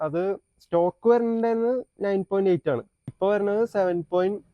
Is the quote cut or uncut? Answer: cut